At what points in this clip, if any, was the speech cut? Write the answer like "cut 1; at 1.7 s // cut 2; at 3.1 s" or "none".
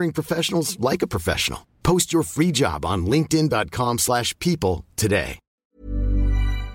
cut 1; at 5.5 s